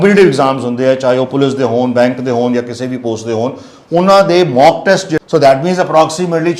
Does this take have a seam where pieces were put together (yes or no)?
yes